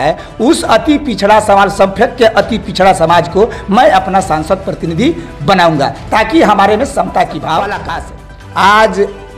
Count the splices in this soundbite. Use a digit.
1